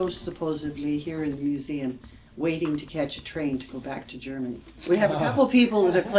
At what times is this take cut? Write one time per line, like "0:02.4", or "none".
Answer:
0:04.7